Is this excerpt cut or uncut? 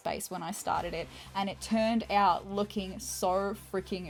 uncut